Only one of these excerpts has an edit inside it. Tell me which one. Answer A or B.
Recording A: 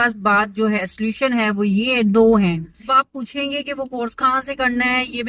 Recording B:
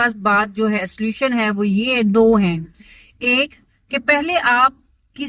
A